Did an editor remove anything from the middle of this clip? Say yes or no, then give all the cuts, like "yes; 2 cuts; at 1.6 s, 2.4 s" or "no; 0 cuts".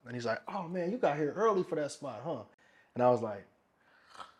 no; 0 cuts